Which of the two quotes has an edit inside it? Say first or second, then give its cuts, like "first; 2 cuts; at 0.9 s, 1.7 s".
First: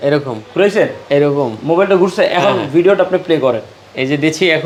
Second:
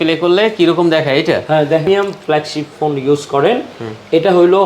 second; 1 cut; at 1.9 s